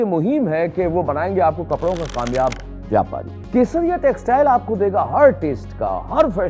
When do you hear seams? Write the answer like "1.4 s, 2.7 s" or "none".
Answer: 3.3 s